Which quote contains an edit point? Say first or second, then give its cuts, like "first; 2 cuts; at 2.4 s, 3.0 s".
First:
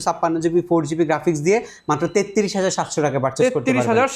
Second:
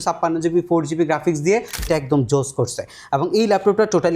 second; 1 cut; at 1.9 s